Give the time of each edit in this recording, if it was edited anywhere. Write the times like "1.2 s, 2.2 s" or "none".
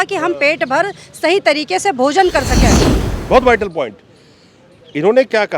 2.9 s